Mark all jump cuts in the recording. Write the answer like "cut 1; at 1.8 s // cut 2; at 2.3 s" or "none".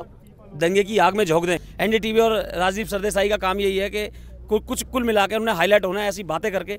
cut 1; at 1.6 s